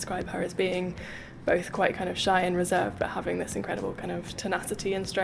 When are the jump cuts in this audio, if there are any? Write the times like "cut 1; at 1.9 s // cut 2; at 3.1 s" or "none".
none